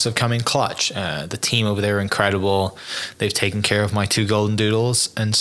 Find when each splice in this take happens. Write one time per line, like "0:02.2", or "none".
none

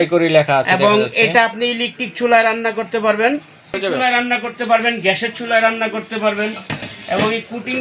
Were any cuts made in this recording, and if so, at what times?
0:03.8

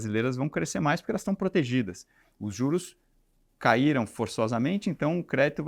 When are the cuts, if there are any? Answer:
none

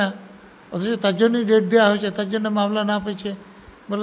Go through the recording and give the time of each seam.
none

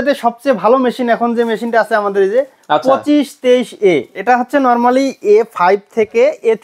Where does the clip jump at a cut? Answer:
0:04.1

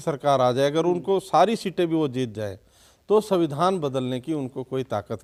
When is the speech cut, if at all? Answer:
none

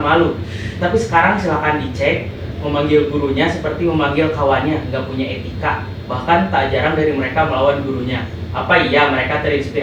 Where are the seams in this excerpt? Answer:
none

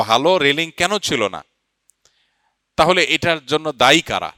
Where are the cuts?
none

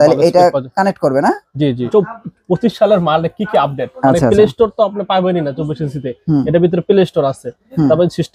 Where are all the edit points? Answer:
0:01.9

